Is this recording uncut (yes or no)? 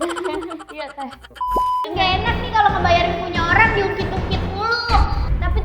no